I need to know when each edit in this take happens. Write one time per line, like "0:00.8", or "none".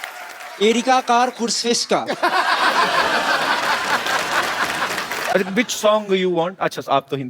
0:05.3